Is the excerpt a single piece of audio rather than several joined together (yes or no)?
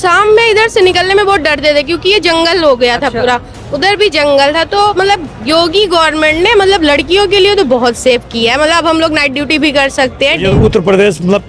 no